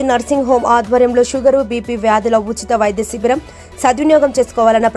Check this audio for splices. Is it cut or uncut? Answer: uncut